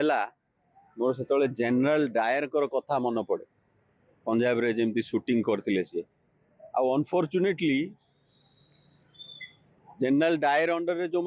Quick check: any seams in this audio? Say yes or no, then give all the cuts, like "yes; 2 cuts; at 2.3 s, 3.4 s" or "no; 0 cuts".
no; 0 cuts